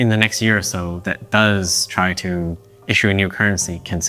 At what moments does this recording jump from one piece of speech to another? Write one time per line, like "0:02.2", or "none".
none